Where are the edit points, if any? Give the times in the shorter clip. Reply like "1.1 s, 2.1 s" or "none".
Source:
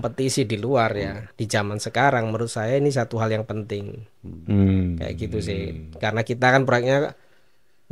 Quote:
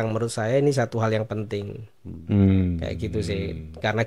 none